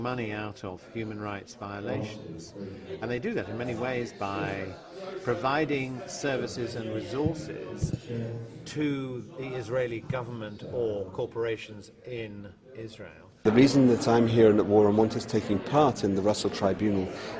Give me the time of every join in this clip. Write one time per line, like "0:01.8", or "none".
0:05.7

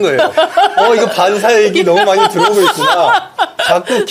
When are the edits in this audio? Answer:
none

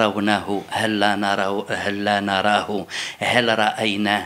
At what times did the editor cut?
none

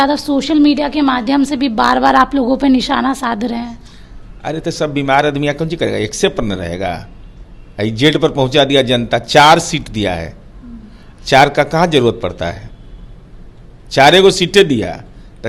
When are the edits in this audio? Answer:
none

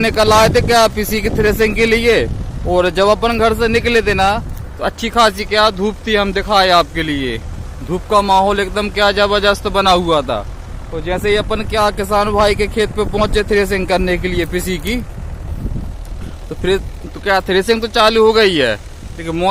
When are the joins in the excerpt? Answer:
none

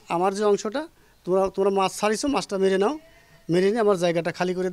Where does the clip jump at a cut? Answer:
none

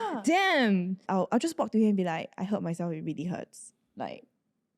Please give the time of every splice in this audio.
0:01.0

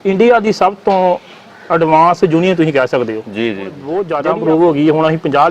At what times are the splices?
0:03.8

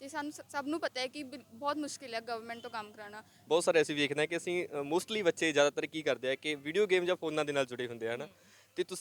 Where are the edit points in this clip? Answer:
0:03.4

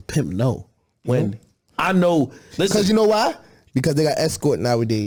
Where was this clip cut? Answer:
none

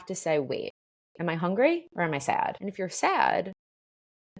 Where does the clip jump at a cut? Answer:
0:02.6

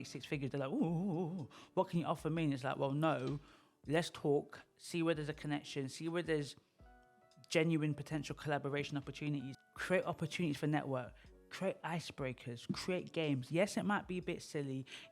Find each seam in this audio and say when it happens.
0:09.5

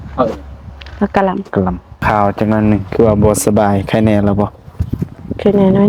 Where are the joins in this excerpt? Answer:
0:02.0

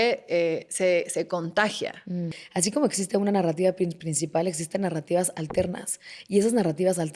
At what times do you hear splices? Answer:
0:02.4

